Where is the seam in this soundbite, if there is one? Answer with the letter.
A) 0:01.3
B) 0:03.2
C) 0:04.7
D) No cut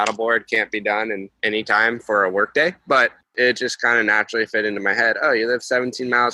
B